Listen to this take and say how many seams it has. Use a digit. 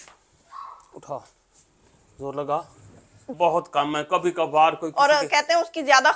1